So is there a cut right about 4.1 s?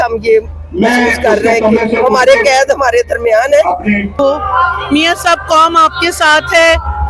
yes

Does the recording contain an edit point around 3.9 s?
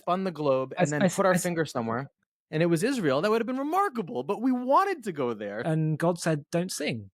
no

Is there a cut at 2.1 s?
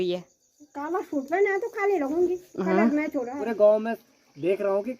no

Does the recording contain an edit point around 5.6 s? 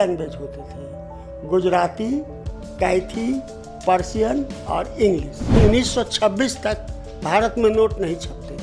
yes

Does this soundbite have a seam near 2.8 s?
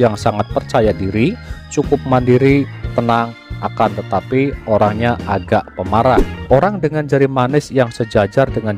no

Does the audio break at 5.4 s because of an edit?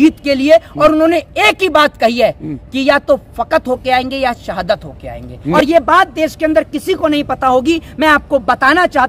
yes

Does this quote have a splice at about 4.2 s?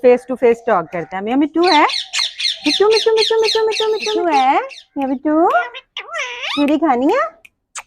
yes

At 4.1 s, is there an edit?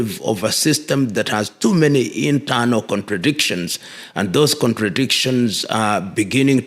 no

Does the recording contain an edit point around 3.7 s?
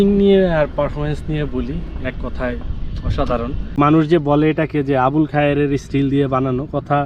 yes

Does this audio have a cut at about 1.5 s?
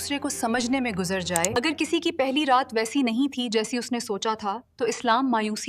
yes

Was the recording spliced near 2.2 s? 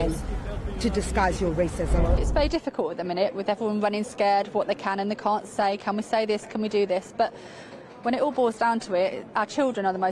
yes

